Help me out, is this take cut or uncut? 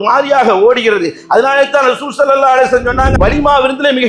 cut